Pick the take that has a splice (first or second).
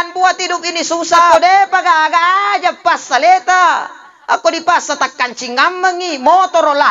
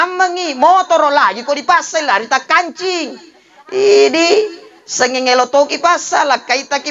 first